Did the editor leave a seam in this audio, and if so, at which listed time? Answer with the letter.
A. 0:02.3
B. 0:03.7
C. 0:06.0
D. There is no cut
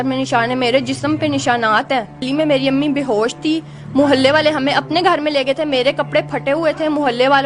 A